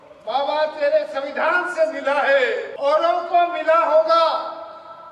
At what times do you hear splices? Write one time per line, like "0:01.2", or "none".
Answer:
0:02.7